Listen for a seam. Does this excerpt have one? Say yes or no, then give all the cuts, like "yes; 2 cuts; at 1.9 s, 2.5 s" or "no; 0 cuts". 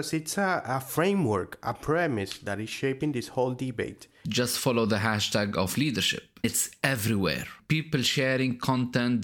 yes; 3 cuts; at 4.3 s, 6.4 s, 7.6 s